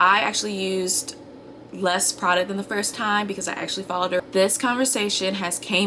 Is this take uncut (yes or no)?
no